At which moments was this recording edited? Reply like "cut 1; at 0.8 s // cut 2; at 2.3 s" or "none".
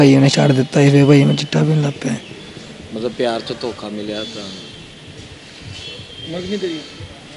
none